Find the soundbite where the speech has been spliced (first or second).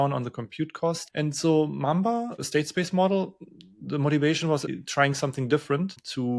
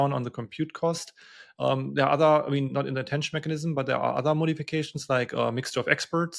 first